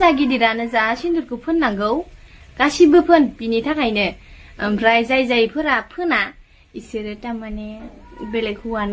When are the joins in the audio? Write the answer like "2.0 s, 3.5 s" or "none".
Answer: none